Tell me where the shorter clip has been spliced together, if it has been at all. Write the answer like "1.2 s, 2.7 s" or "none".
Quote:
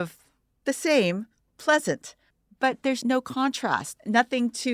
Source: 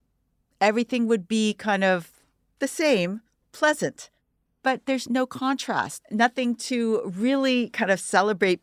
2.8 s